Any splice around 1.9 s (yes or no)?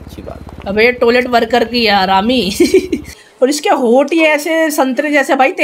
no